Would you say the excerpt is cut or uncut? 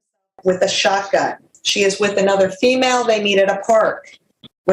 uncut